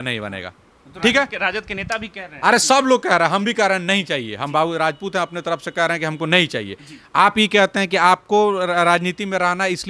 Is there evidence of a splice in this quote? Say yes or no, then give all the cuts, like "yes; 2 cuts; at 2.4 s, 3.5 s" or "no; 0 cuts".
no; 0 cuts